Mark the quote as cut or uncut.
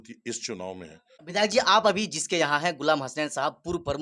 cut